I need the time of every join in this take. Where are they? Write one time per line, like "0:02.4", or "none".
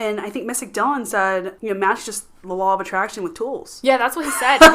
0:01.5